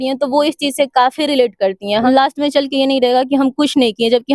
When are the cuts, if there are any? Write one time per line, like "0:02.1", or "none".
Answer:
0:02.0